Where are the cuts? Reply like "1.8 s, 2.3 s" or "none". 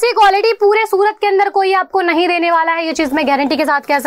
none